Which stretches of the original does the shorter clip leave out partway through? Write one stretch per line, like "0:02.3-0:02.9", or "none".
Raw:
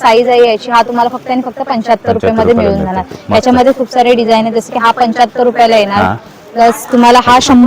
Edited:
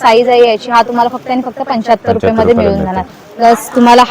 0:03.1-0:06.3